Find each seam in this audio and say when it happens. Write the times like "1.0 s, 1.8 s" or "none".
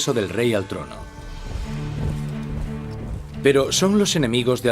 1.3 s